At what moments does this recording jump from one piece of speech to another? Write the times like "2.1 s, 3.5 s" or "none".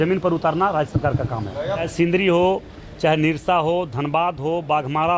1.9 s